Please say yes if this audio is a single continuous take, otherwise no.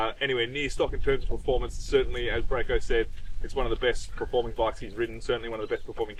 yes